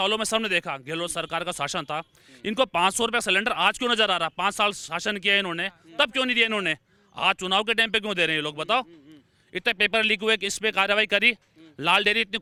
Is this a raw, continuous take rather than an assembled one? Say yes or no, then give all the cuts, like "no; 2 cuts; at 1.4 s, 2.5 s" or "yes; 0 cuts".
yes; 0 cuts